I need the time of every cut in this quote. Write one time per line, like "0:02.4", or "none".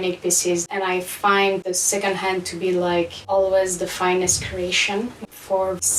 none